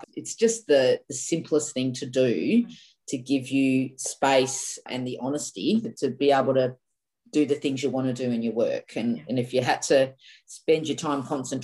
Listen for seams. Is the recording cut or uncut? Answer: cut